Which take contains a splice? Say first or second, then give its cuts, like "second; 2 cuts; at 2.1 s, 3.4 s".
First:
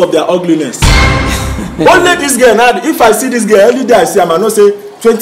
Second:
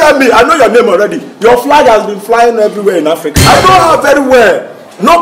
second; 1 cut; at 3.3 s